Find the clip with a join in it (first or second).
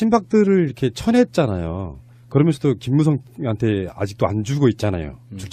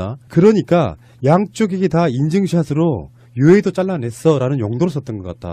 first